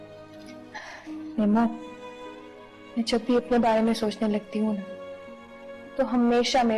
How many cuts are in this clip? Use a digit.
0